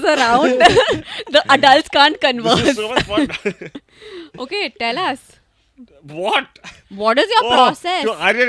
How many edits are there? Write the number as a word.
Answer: zero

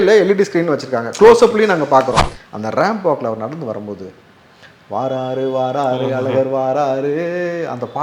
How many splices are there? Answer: one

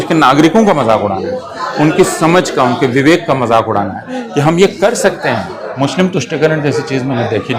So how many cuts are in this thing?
one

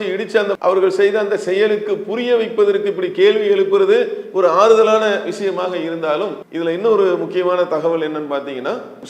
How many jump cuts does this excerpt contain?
one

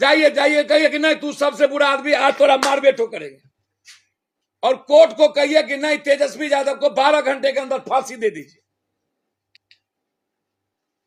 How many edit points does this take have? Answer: zero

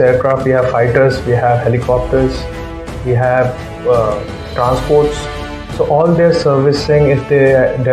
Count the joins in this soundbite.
zero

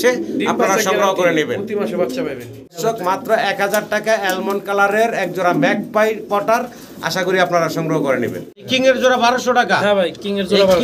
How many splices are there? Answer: two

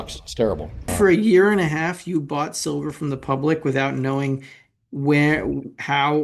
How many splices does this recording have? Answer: one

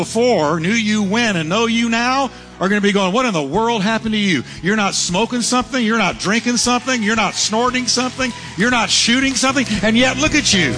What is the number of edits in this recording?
zero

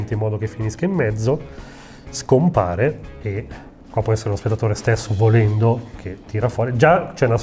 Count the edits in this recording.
zero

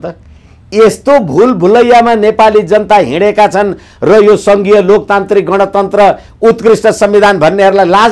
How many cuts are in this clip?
zero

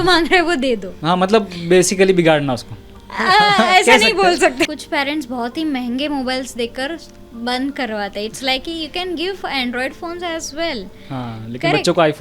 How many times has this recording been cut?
two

